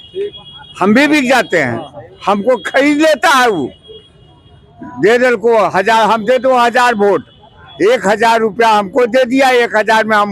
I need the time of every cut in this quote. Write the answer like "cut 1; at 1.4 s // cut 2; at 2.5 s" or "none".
none